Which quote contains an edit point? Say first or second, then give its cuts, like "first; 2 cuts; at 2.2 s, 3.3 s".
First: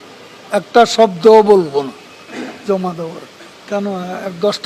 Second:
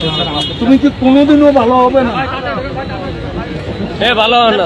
first; 1 cut; at 3.6 s